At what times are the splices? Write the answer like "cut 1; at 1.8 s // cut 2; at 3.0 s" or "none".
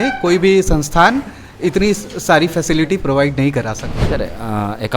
cut 1; at 3.9 s

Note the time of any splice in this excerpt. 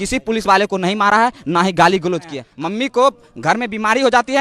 cut 1; at 2.4 s

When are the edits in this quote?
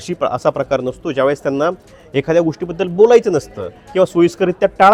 none

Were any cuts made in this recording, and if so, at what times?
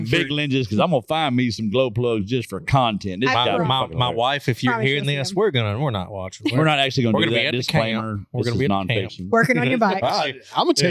none

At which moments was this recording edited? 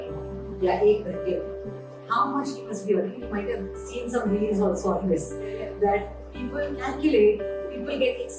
none

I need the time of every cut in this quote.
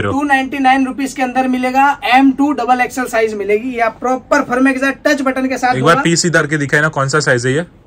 none

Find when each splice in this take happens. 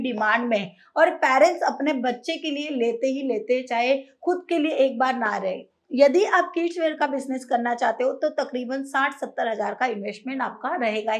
cut 1; at 5.8 s

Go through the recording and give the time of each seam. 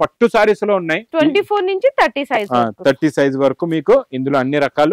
cut 1; at 1.0 s

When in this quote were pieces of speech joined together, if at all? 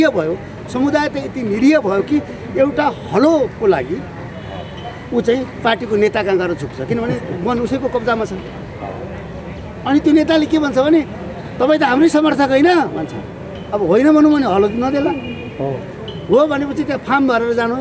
none

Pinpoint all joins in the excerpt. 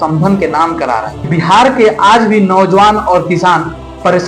cut 1; at 1.1 s

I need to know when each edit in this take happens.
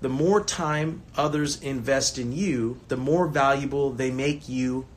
cut 1; at 1.0 s // cut 2; at 2.8 s

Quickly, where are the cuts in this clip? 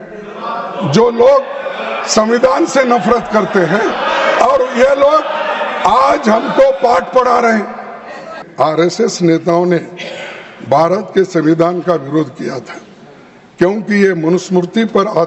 cut 1; at 8.4 s

